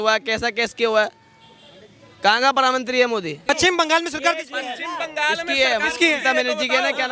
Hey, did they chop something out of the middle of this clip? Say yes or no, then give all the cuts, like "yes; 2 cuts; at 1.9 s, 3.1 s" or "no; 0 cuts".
yes; 1 cut; at 3.5 s